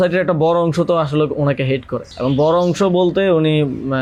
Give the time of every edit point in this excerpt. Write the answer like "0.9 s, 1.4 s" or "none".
none